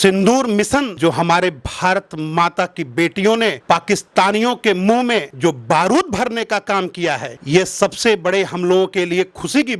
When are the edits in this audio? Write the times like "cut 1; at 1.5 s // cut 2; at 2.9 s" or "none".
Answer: cut 1; at 0.9 s